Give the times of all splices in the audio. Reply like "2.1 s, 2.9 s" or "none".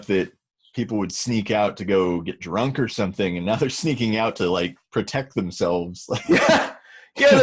none